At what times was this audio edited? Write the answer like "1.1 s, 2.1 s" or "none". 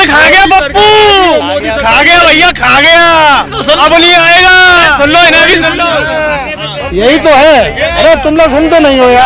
none

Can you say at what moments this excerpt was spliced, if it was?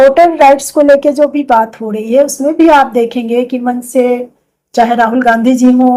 none

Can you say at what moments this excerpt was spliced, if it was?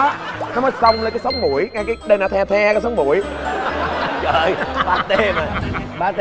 none

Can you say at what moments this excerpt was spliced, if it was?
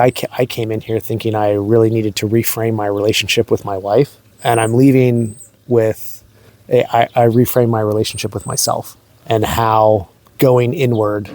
4.3 s, 9.2 s, 10.2 s

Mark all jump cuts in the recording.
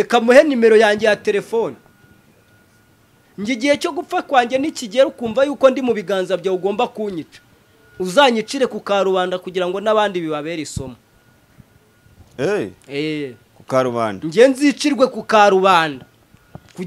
none

